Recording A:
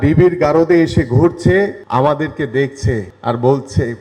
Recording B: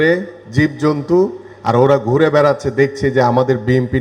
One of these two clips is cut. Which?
A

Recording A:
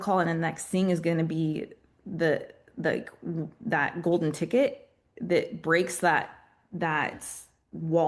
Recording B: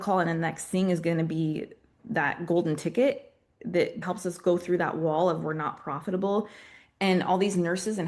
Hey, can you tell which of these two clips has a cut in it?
B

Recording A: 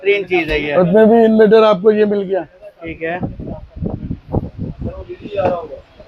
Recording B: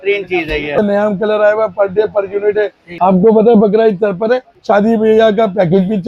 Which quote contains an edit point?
B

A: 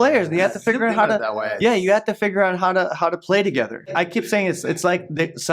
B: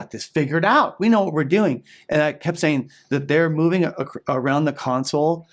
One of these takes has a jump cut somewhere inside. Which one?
A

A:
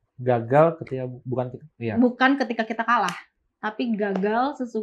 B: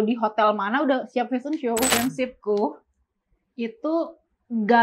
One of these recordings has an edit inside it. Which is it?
B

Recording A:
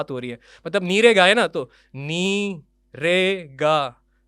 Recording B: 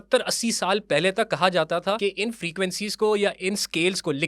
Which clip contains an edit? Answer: B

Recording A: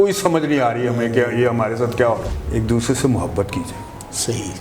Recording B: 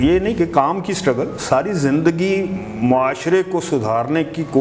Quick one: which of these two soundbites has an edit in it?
A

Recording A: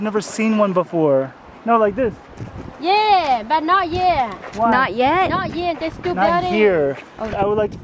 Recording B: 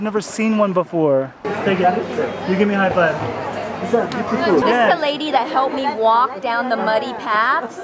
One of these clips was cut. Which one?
B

